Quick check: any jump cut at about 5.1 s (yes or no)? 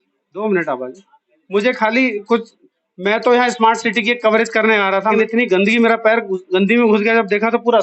yes